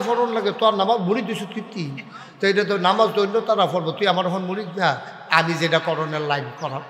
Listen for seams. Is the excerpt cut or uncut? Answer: uncut